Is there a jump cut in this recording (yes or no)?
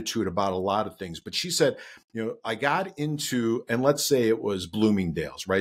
no